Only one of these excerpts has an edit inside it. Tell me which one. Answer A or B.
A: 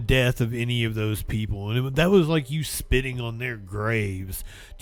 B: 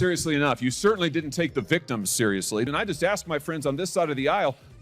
B